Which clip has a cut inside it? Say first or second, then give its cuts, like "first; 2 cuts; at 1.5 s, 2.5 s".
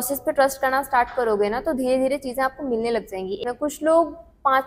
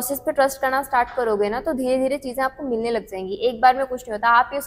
first; 1 cut; at 3.4 s